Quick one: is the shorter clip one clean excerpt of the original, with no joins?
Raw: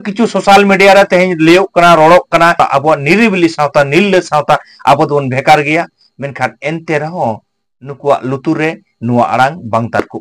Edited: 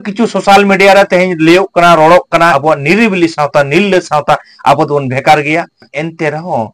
no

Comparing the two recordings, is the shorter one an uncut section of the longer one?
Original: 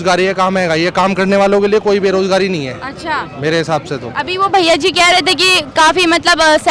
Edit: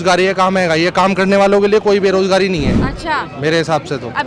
yes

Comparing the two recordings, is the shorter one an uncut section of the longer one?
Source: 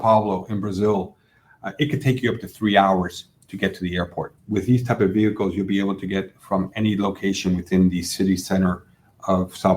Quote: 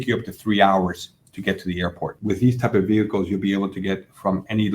no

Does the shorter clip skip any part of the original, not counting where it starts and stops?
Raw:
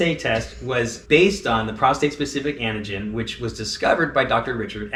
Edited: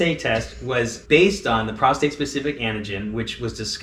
no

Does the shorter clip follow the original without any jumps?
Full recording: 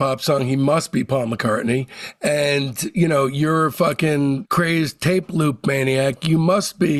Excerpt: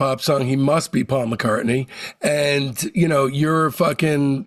yes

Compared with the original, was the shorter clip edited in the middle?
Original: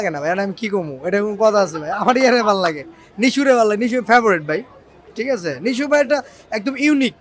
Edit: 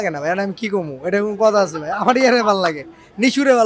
no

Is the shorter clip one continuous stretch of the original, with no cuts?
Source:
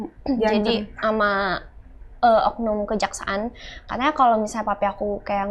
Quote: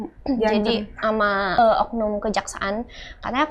no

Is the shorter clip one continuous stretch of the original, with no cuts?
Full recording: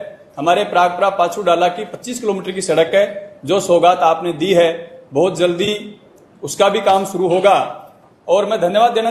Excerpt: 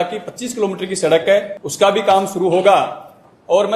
no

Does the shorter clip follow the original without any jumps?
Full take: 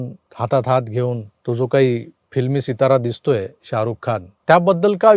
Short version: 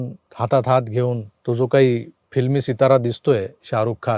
yes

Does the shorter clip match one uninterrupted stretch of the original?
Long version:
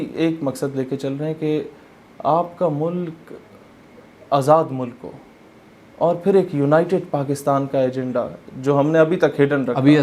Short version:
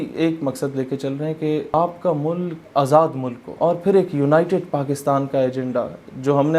no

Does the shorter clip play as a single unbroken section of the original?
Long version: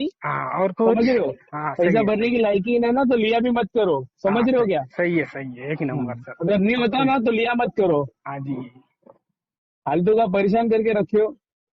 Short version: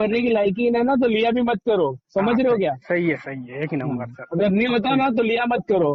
yes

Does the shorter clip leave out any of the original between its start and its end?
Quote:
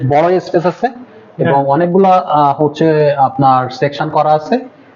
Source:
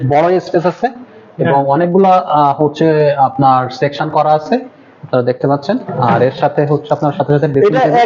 no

